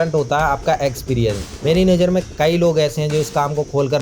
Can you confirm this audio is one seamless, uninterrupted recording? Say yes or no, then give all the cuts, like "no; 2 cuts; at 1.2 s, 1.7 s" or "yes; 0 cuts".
no; 1 cut; at 1.5 s